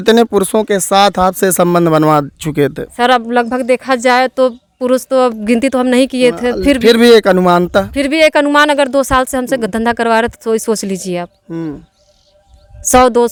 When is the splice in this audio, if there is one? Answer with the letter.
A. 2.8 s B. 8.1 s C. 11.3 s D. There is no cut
D